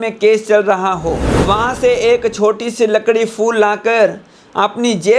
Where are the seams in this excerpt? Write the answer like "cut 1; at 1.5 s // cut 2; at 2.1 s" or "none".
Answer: cut 1; at 1.3 s

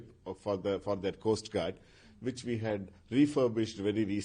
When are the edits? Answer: none

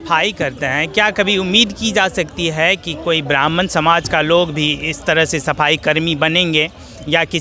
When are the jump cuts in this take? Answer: none

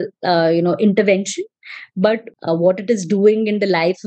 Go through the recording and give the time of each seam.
cut 1; at 2.3 s

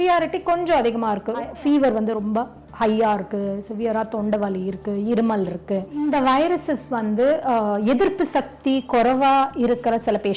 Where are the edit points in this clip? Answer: cut 1; at 1.5 s // cut 2; at 5.9 s

